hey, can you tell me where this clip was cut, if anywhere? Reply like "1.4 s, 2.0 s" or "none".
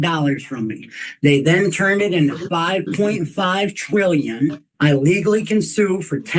4.6 s